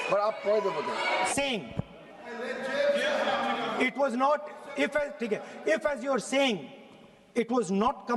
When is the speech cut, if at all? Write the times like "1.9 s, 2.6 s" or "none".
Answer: 1.3 s